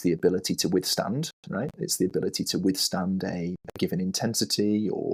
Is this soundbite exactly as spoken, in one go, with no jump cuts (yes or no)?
yes